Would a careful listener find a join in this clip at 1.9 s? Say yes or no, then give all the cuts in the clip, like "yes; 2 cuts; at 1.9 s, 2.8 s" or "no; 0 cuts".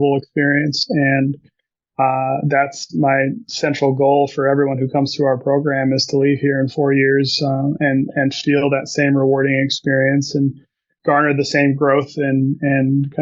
no; 0 cuts